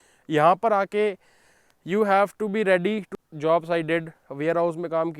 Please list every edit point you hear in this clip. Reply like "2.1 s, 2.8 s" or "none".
3.1 s